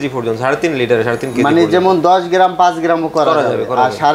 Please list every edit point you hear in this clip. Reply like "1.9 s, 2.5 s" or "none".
none